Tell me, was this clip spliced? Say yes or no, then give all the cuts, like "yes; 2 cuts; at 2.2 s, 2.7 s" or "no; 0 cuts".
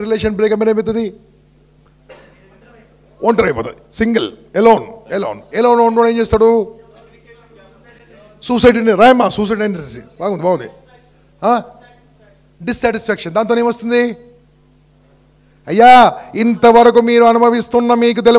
no; 0 cuts